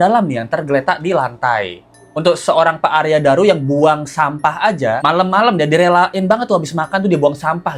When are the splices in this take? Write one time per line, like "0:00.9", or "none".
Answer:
0:05.0